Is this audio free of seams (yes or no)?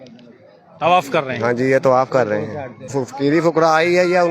no